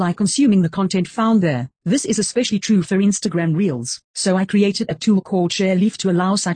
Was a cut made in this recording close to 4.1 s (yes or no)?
no